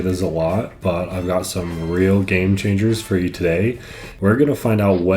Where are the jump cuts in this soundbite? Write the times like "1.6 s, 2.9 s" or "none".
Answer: 4.1 s